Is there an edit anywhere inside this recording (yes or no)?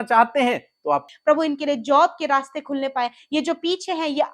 yes